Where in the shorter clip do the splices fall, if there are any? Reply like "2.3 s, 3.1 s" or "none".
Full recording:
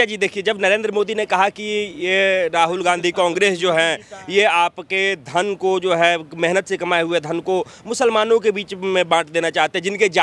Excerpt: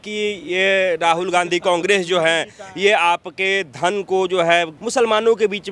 4.7 s